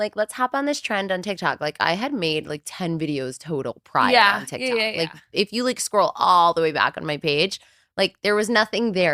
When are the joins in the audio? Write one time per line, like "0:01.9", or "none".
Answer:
none